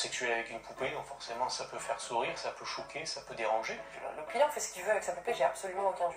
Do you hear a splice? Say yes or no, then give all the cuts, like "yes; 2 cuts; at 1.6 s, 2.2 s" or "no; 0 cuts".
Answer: yes; 1 cut; at 4.2 s